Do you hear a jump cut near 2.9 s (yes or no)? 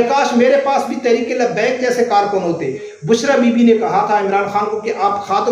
yes